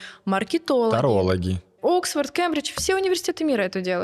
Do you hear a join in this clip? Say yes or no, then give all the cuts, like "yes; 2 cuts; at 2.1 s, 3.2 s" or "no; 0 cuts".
yes; 1 cut; at 1.7 s